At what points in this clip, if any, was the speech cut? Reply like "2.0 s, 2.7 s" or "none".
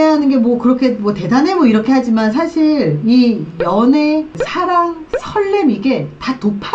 none